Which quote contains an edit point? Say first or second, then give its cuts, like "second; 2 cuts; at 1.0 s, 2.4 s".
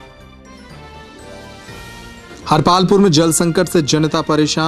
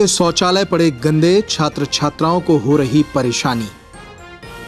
second; 1 cut; at 3.7 s